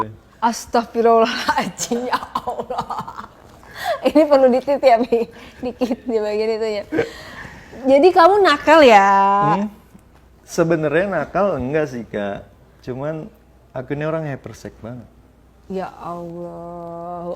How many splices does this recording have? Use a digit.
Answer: 0